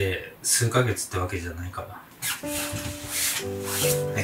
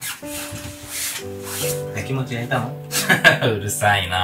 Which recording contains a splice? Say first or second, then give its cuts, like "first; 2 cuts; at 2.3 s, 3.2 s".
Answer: second; 1 cut; at 2.9 s